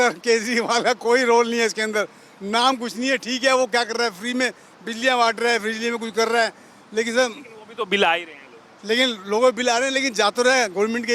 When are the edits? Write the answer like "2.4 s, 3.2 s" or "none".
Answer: none